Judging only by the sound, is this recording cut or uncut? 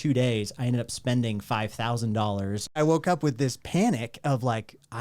cut